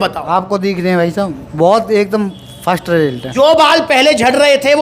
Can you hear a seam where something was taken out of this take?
yes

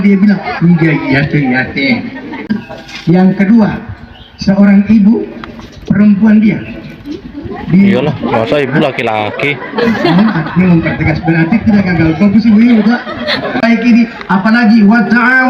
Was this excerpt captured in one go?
no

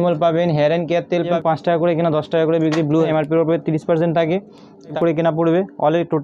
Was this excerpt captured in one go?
no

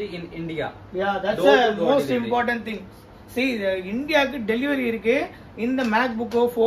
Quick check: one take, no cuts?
yes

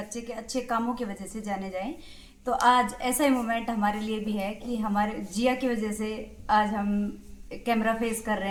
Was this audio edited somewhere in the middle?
no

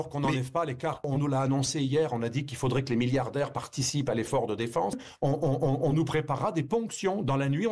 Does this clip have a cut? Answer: yes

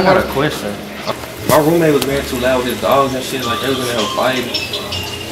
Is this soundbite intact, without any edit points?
no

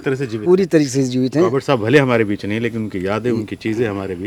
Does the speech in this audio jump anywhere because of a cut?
no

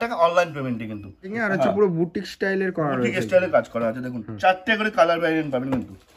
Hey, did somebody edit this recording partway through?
yes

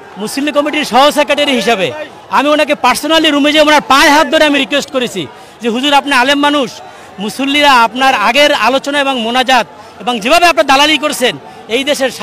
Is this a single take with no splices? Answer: yes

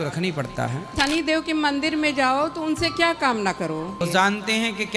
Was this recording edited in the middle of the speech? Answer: yes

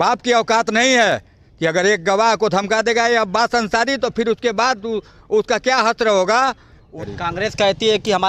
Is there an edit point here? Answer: yes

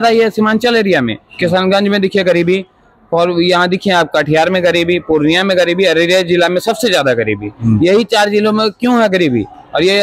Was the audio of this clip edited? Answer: no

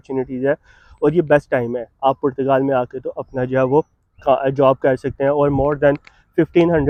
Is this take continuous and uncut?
yes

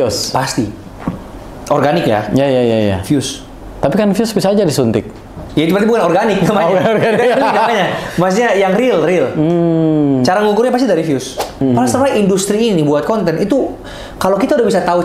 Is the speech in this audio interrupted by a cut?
yes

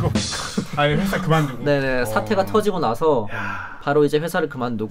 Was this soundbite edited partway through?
no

